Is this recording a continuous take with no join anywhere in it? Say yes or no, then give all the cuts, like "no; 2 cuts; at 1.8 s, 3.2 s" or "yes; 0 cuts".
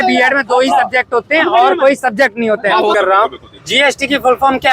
no; 1 cut; at 2.9 s